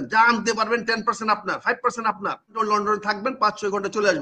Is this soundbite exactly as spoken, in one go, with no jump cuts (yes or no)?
no